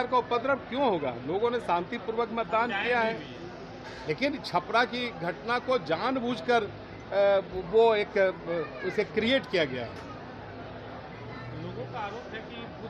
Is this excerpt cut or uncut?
uncut